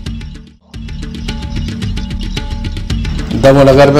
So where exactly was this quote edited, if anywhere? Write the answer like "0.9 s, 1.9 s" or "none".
1.1 s